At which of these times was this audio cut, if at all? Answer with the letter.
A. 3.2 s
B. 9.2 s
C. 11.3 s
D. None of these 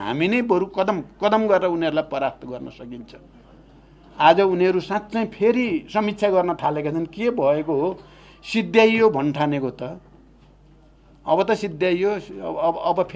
D